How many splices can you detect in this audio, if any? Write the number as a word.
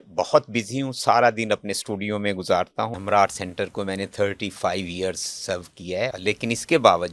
two